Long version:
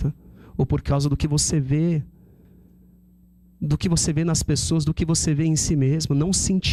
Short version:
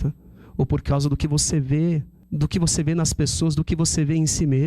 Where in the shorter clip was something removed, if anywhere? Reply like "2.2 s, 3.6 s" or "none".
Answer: 2.2 s